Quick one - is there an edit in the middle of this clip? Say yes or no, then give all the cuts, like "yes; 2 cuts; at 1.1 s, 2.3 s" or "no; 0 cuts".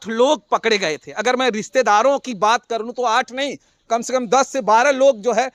no; 0 cuts